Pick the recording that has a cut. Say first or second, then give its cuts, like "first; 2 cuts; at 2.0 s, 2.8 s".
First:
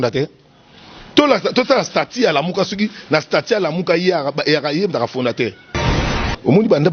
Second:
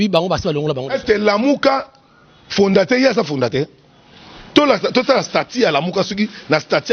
first; 1 cut; at 6.0 s